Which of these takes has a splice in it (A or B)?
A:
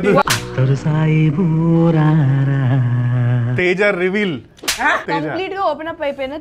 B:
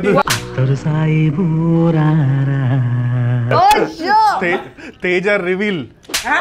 A